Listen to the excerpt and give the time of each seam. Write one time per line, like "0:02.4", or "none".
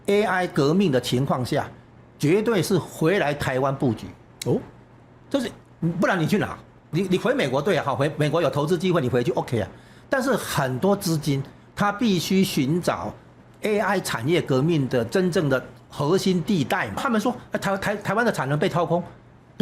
0:06.9
0:17.0

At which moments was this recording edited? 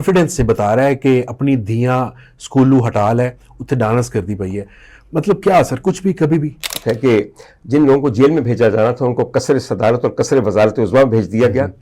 0:06.7

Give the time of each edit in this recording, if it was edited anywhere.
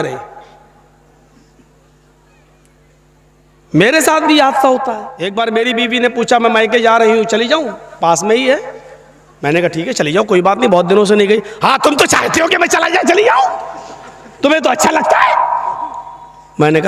0:05.1

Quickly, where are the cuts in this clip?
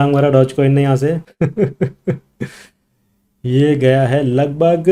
0:01.3

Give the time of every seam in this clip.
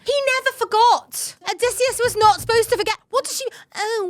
0:01.4

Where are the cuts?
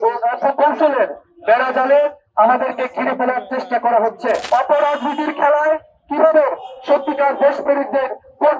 0:04.4

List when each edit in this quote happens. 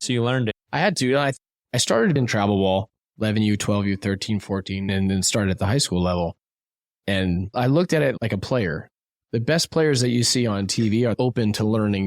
0:11.2

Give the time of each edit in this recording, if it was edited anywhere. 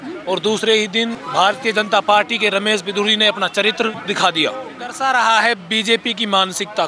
0:01.2
0:04.0
0:05.0

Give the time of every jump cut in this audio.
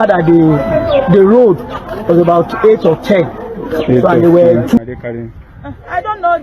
0:04.8

